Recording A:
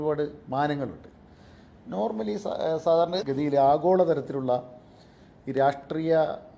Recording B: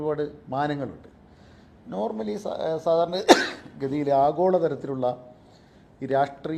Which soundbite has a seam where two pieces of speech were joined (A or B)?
A